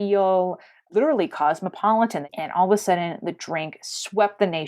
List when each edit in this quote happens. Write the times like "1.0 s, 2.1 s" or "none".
2.3 s

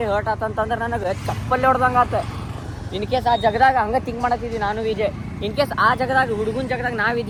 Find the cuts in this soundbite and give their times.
none

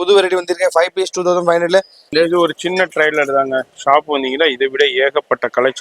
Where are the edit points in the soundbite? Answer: 2.1 s

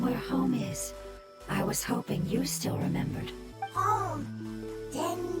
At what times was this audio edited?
3.4 s

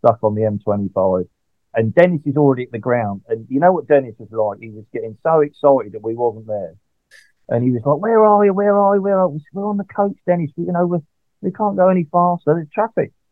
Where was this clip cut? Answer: 1.7 s

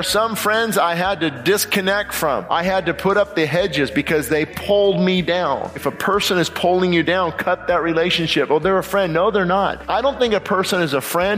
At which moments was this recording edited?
2.4 s, 4.5 s, 5.9 s, 9.8 s

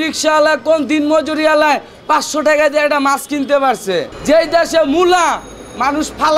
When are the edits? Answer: 4.1 s

